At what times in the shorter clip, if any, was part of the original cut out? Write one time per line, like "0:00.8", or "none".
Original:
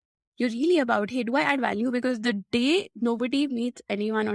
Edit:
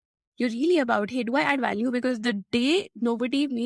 none